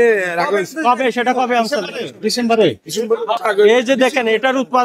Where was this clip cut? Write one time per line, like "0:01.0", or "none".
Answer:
0:03.4